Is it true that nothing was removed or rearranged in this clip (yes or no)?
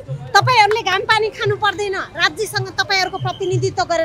yes